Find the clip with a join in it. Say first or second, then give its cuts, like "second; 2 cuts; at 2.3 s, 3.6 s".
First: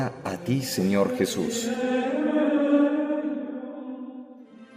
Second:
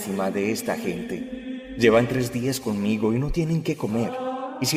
first; 1 cut; at 1.0 s